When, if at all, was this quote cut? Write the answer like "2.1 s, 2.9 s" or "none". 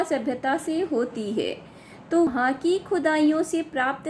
2.3 s